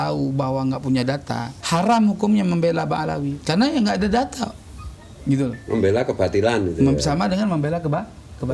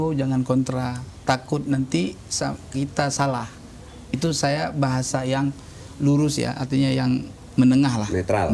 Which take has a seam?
first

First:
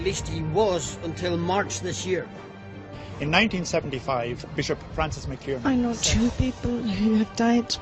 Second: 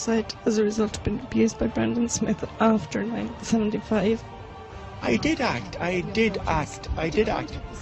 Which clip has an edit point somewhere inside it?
second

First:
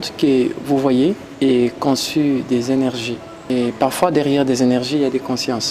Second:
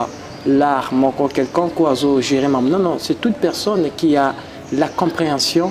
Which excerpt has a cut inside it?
first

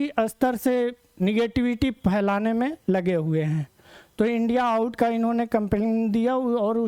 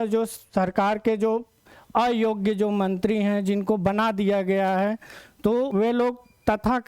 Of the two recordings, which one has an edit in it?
second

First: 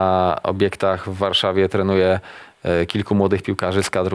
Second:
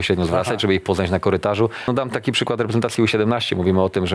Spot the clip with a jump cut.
second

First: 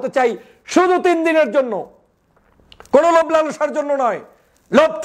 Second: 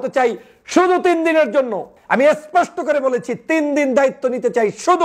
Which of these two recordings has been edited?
second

